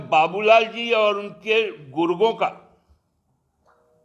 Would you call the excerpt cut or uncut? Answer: uncut